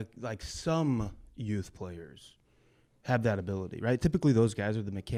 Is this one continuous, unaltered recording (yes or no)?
yes